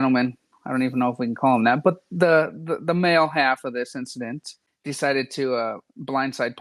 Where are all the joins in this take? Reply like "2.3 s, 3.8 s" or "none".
4.1 s